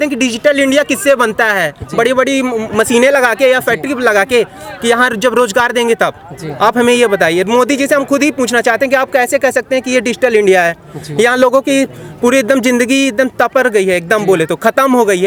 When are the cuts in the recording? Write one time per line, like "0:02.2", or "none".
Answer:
none

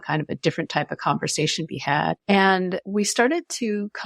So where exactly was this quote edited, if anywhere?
0:02.2
0:02.8

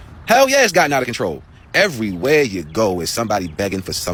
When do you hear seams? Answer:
none

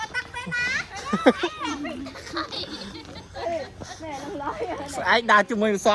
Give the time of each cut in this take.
none

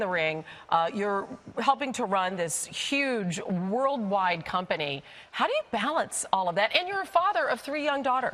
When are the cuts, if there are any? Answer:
none

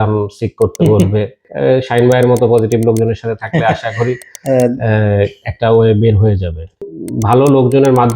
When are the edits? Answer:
0:01.5
0:06.9

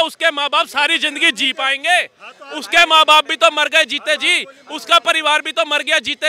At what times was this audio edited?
none

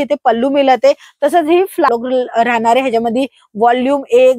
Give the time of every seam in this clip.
0:01.9

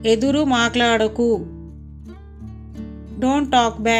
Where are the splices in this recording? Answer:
0:01.4
0:03.0

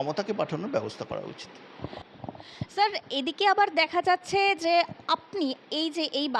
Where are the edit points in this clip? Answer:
none

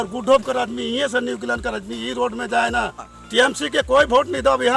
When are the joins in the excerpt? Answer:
0:03.1

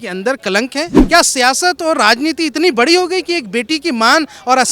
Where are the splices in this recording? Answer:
0:01.0

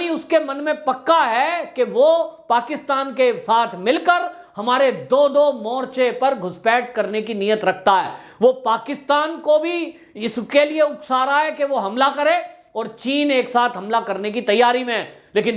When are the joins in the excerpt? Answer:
none

